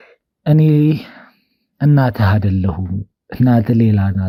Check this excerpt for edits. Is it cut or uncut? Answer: uncut